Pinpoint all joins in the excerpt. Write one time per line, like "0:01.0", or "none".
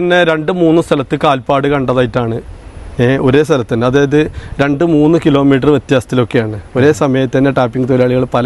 none